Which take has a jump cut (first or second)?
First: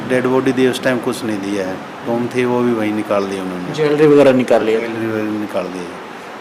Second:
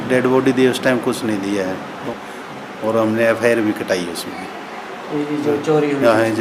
second